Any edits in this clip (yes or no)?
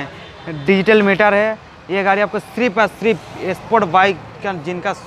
no